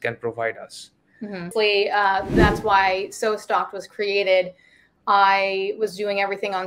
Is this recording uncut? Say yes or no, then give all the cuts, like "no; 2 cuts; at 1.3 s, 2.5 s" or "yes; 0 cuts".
no; 1 cut; at 1.5 s